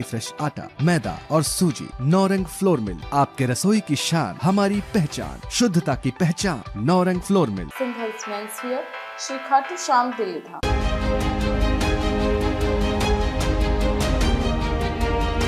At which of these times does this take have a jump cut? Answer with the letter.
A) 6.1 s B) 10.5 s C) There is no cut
B